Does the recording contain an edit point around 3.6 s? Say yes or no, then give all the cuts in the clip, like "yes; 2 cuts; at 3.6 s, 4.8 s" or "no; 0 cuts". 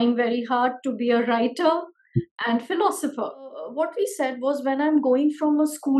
yes; 1 cut; at 3.6 s